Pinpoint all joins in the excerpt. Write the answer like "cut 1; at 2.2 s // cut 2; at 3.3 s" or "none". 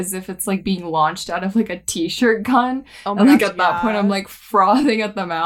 none